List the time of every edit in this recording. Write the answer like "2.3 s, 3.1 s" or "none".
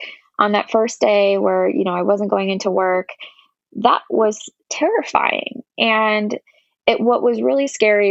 none